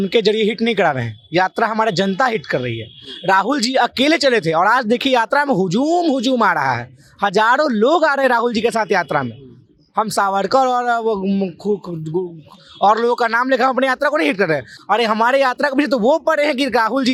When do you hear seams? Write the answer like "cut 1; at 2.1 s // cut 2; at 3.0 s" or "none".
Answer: none